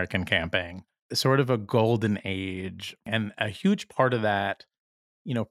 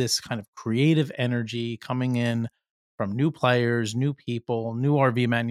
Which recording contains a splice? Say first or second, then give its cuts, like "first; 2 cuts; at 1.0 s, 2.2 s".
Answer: first; 2 cuts; at 1.0 s, 3.0 s